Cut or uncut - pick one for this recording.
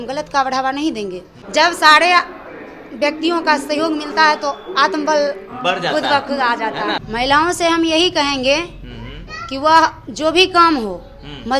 cut